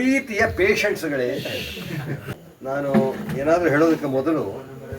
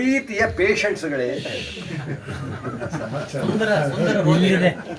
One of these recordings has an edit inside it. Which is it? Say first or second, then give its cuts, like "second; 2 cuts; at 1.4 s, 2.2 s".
first; 1 cut; at 2.3 s